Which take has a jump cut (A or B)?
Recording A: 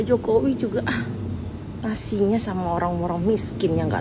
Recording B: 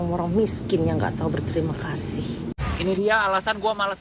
B